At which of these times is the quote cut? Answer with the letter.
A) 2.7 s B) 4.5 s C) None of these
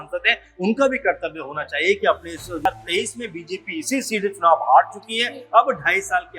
A